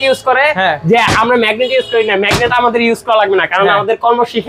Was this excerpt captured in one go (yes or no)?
yes